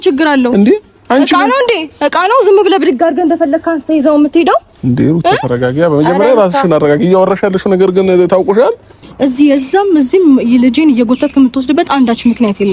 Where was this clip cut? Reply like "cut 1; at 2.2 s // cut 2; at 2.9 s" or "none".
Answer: cut 1; at 9.0 s